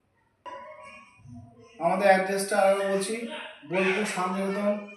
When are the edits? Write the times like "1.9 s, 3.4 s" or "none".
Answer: 3.1 s